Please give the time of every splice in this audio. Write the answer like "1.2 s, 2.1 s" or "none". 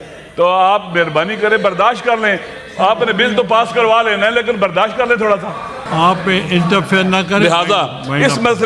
5.8 s